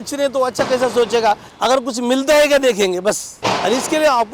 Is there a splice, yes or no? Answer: yes